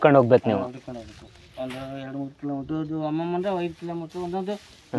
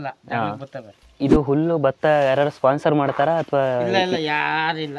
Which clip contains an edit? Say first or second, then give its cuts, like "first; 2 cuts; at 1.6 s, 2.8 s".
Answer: second; 1 cut; at 1.0 s